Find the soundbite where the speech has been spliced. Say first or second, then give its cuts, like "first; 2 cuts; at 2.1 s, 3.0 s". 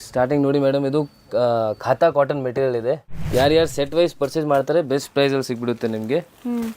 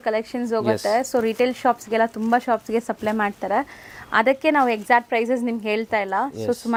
first; 1 cut; at 3.1 s